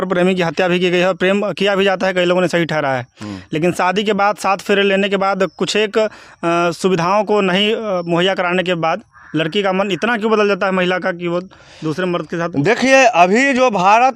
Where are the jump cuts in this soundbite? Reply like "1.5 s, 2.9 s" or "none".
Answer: none